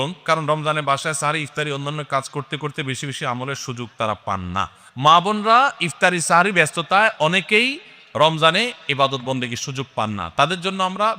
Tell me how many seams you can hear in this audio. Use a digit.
0